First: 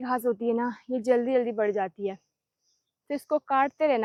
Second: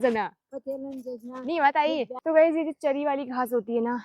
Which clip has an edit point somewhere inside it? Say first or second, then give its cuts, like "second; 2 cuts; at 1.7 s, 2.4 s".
second; 1 cut; at 2.1 s